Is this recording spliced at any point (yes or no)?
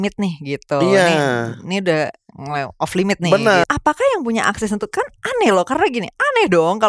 yes